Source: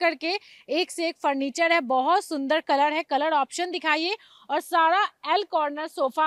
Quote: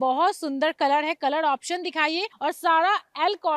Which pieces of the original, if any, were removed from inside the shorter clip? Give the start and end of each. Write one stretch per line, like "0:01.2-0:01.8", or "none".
0:04.2-0:04.4